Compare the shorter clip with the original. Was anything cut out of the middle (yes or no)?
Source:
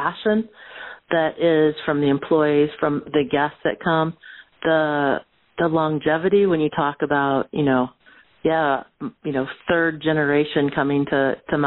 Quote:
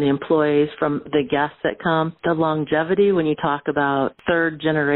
yes